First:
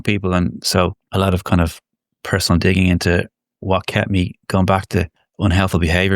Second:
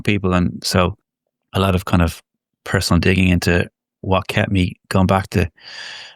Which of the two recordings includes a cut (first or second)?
first